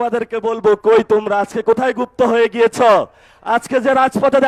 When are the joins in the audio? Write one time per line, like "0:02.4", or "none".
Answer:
none